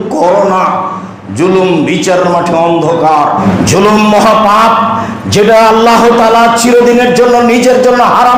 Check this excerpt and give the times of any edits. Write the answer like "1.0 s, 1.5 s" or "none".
3.4 s

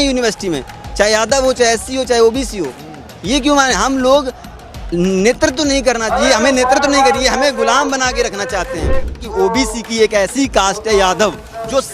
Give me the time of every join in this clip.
9.1 s

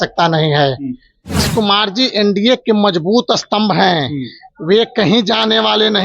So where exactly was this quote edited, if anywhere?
1.5 s

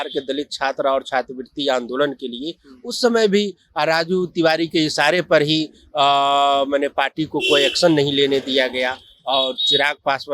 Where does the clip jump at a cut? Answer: none

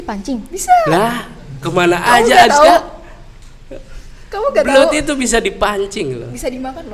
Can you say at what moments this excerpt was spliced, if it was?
none

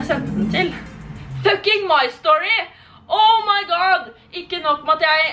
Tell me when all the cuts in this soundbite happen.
none

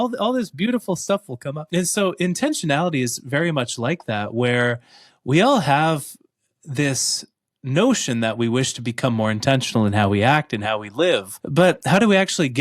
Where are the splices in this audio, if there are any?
1.7 s, 11.4 s

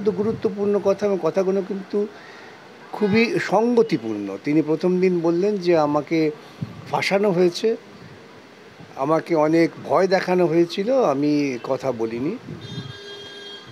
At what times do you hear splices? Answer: none

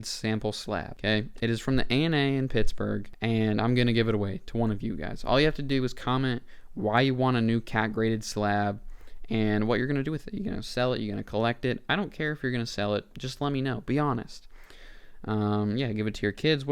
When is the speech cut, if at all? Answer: 0.9 s, 3.1 s

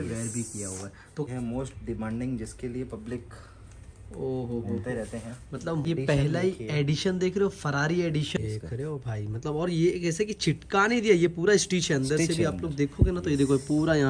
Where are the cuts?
1.3 s, 5.9 s, 8.4 s

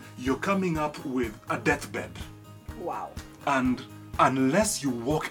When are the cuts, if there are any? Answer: none

